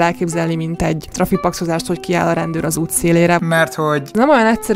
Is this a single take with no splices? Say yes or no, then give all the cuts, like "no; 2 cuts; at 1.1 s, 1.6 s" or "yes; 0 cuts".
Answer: no; 2 cuts; at 1.1 s, 4.0 s